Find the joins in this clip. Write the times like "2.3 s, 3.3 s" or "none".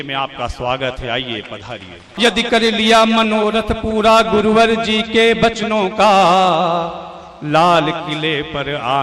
2.1 s